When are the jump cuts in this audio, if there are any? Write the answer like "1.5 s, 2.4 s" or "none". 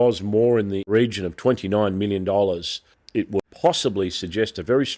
0.9 s, 3.4 s